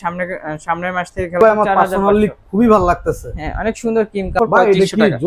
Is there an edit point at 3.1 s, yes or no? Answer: no